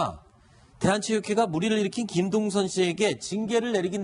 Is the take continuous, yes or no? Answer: yes